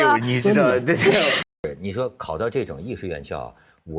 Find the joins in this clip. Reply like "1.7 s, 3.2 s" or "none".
1.5 s